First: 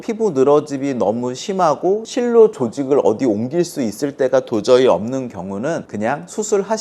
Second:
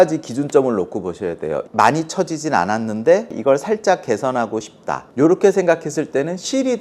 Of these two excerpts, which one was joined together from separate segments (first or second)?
second